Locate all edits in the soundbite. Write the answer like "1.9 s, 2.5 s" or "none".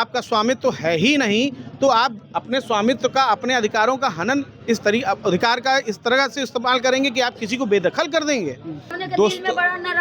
8.9 s